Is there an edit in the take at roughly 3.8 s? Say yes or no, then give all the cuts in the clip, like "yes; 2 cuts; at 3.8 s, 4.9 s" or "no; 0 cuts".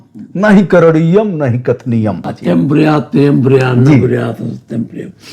no; 1 cut; at 2.3 s